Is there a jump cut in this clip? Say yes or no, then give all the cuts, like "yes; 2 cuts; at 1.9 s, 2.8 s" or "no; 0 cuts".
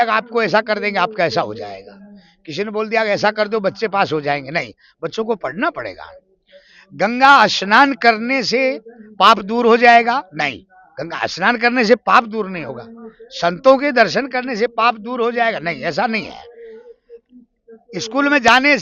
no; 0 cuts